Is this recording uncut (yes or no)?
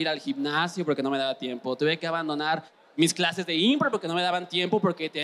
no